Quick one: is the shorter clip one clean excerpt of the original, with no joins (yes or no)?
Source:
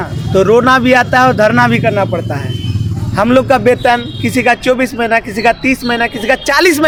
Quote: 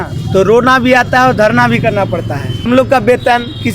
no